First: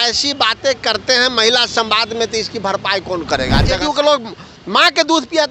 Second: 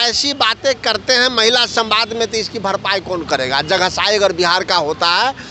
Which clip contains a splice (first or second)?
first